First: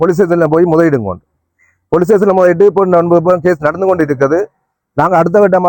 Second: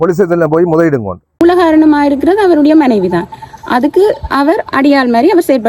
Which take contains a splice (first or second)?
second